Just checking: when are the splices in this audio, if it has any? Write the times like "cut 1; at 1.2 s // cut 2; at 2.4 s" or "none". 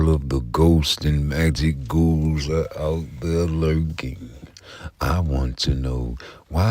cut 1; at 0.9 s